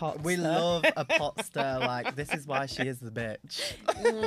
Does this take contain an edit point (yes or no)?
no